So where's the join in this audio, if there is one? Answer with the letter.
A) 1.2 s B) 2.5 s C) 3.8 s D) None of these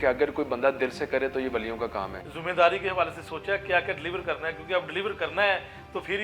B